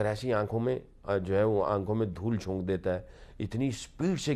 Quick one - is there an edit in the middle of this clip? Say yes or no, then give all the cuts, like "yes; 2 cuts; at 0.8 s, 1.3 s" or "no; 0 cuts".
no; 0 cuts